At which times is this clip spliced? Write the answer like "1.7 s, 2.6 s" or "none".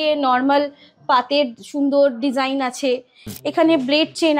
3.2 s